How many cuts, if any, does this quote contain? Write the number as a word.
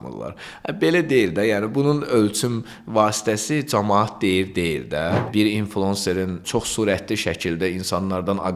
one